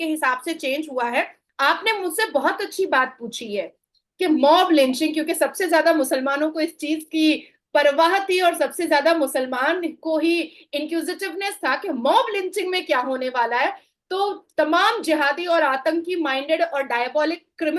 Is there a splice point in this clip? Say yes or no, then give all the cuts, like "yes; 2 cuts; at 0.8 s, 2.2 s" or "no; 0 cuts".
yes; 1 cut; at 1.4 s